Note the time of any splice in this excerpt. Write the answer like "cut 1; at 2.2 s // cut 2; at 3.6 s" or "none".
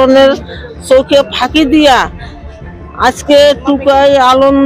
none